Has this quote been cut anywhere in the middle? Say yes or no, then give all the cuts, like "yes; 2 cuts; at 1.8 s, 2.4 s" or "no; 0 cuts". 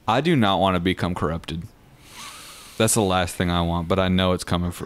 no; 0 cuts